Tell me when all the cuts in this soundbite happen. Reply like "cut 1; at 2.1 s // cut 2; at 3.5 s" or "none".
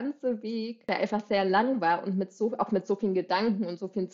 cut 1; at 0.9 s